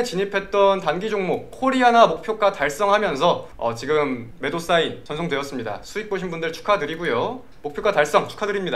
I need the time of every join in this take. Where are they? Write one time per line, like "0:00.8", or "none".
0:07.4

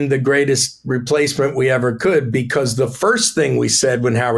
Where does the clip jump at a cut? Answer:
none

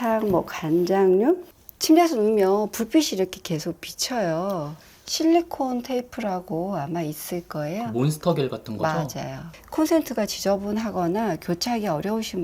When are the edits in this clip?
0:01.5
0:04.8
0:09.4

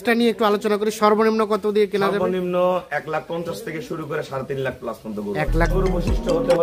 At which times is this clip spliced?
0:05.7

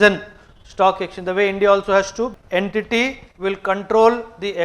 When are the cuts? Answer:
0:02.3

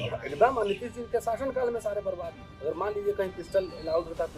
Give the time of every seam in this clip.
0:02.4

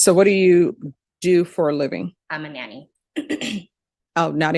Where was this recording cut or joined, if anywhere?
0:02.2

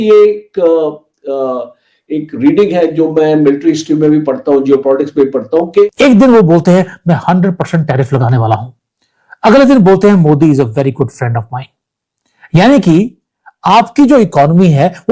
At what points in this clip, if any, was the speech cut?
0:05.9

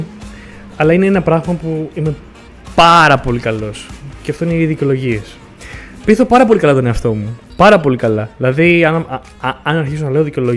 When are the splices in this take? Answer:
none

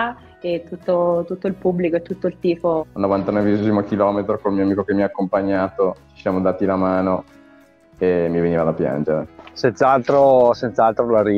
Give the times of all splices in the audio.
0:02.8

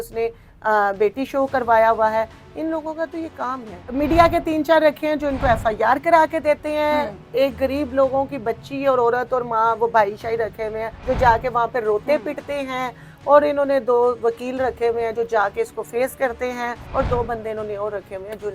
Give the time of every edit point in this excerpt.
0:03.9
0:10.9
0:16.8

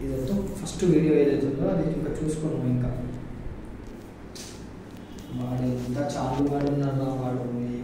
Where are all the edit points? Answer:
none

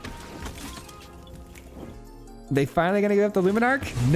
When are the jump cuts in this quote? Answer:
0:02.0

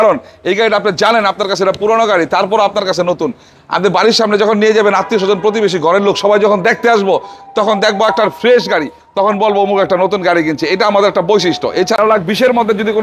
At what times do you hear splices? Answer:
0:12.0

